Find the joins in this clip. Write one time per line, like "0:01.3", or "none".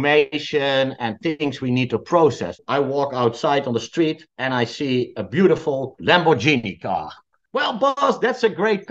0:02.6
0:07.4

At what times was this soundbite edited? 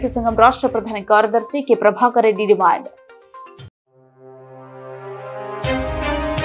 none

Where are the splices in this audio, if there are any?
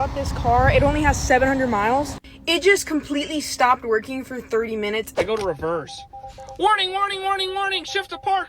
0:05.1

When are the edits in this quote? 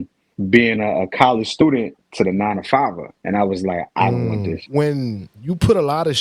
0:04.6

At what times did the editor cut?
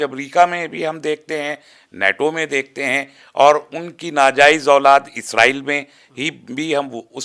none

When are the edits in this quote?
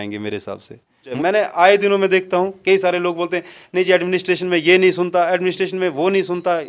0:01.1

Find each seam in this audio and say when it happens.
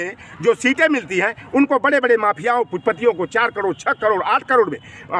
none

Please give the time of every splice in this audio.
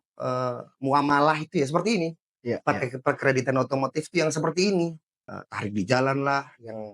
0:05.3

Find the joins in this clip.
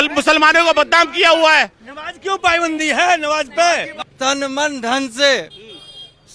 0:04.1

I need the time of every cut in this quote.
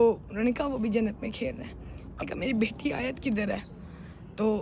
0:02.2

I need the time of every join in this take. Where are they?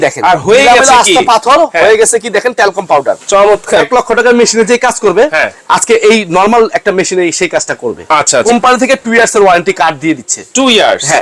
0:03.8
0:08.4

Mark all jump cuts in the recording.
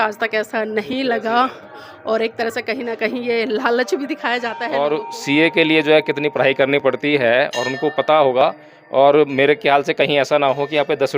0:04.5

